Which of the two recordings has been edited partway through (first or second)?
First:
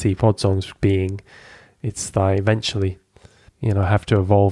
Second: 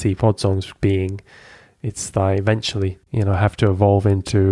second